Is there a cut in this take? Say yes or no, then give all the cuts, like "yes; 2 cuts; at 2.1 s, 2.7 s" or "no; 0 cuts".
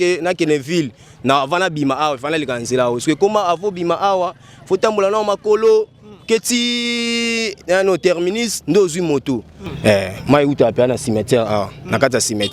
yes; 1 cut; at 9.7 s